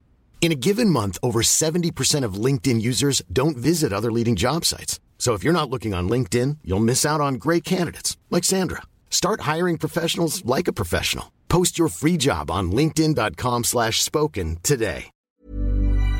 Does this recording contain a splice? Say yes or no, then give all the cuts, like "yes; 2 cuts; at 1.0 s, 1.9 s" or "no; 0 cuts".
yes; 1 cut; at 15.1 s